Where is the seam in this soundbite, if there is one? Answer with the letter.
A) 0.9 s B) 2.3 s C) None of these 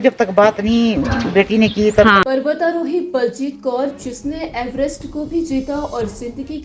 B